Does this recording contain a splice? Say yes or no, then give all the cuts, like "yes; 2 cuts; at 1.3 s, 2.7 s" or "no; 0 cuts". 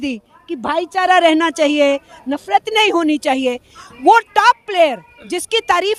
no; 0 cuts